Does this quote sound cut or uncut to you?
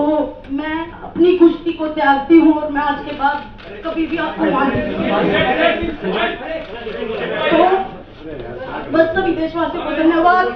uncut